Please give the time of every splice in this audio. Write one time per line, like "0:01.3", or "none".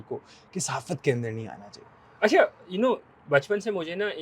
none